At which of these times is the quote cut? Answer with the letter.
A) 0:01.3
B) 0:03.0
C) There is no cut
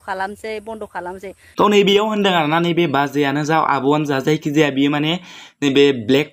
C